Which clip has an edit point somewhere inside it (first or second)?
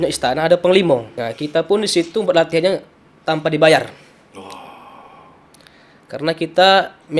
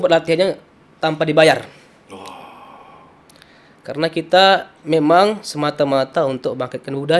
first